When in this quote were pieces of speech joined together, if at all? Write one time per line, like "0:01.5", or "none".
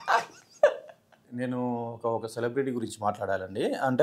0:01.2